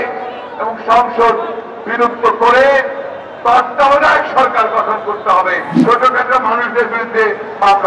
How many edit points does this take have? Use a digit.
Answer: 1